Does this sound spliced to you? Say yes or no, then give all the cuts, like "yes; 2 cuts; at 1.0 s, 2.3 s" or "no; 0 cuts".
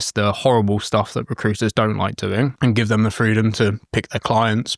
yes; 1 cut; at 2.5 s